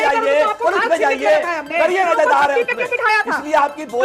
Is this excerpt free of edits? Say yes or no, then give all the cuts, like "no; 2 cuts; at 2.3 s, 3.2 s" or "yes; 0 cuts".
no; 1 cut; at 2.1 s